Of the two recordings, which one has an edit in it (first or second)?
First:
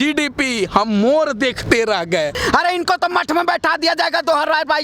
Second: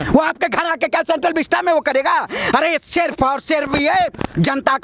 first